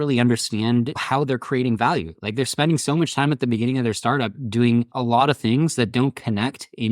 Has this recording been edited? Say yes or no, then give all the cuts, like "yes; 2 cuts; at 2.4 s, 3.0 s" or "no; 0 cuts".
yes; 2 cuts; at 1.0 s, 4.9 s